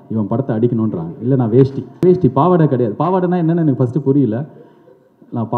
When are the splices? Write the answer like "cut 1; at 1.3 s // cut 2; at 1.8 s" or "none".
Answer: cut 1; at 2.0 s